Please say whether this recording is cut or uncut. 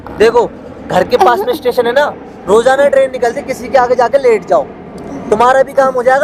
uncut